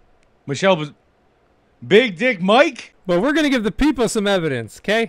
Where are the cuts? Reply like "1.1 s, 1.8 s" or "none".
3.0 s